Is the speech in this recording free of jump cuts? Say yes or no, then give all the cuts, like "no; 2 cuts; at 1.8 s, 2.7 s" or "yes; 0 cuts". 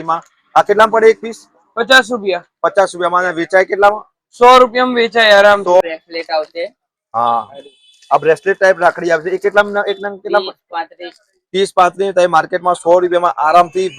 no; 1 cut; at 5.8 s